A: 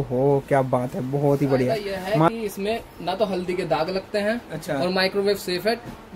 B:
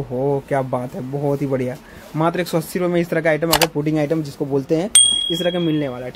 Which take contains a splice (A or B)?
A